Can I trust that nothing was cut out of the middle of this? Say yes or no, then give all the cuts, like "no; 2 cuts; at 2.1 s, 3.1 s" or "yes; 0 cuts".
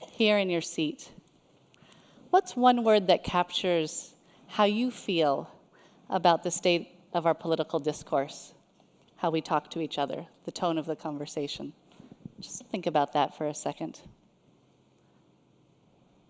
no; 1 cut; at 5.4 s